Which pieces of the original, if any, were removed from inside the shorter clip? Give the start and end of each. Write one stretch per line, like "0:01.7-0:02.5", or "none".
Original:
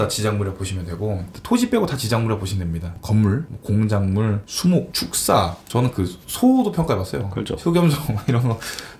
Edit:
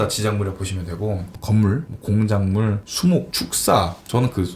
0:01.3-0:02.9